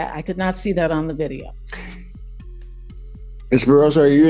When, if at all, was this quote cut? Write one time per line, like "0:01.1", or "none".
none